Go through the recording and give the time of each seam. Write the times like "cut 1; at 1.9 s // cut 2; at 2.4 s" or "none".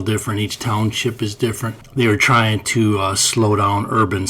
cut 1; at 1.7 s